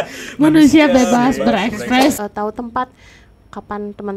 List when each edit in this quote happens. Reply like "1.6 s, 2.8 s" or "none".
2.2 s